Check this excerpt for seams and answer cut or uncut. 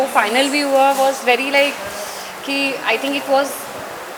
uncut